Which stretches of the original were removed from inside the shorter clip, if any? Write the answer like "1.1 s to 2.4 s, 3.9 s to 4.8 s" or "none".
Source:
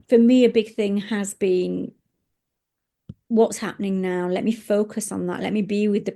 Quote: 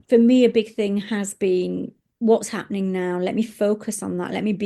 2.0 s to 3.1 s